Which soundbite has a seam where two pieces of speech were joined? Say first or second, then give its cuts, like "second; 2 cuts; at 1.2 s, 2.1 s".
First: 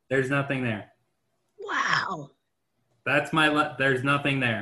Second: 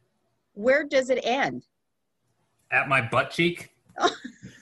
first; 1 cut; at 2.9 s